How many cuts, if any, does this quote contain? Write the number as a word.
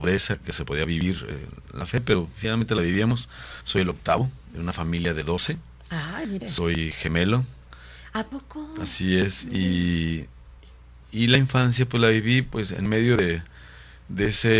one